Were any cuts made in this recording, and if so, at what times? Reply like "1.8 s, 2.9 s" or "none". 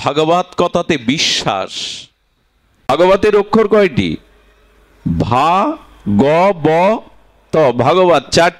2.9 s